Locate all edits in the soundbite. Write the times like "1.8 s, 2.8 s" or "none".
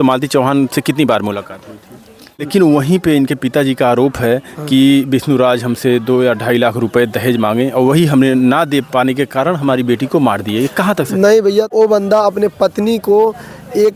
2.5 s, 11.7 s